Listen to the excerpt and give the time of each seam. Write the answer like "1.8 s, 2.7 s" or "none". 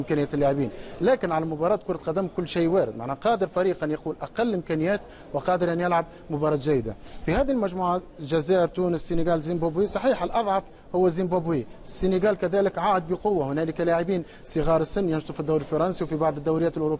none